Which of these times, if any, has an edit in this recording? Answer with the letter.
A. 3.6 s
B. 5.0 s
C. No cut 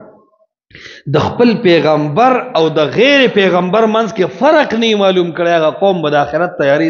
C